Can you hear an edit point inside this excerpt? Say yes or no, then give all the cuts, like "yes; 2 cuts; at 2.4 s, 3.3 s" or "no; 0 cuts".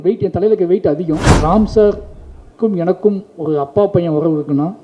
yes; 1 cut; at 1.3 s